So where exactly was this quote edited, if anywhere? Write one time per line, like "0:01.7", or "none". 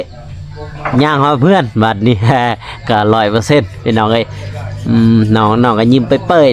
none